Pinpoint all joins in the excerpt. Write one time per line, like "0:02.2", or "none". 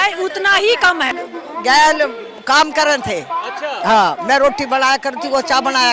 0:01.2